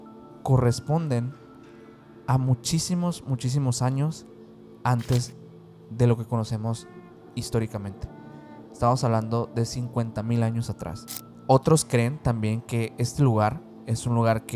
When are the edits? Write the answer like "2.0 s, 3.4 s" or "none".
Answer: 11.0 s